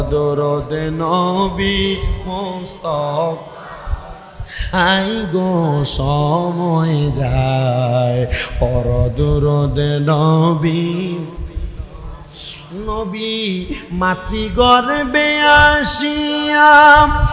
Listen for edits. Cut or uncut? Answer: uncut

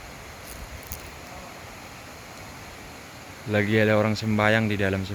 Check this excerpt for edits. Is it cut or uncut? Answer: uncut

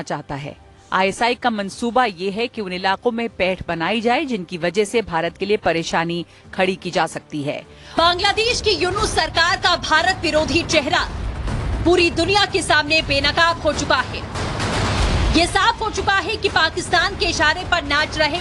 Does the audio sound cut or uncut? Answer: cut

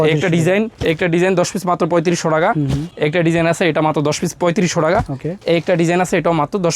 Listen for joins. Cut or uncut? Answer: uncut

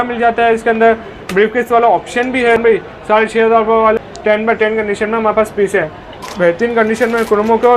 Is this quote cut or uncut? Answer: cut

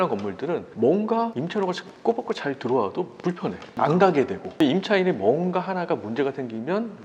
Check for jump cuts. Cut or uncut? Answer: cut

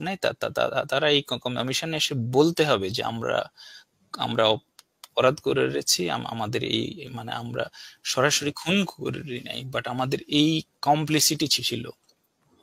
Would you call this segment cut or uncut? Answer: uncut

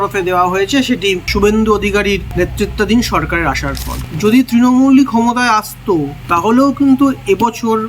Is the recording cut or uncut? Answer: cut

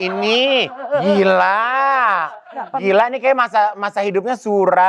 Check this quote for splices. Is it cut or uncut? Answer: uncut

